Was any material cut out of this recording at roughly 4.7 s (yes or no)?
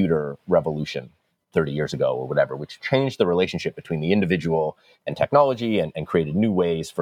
no